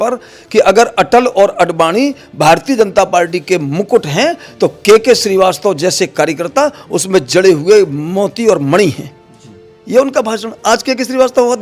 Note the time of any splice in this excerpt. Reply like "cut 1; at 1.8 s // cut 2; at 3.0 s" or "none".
none